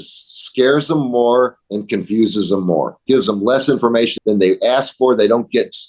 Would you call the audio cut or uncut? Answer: cut